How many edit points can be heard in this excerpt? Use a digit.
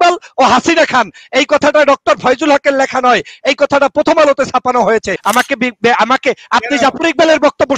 1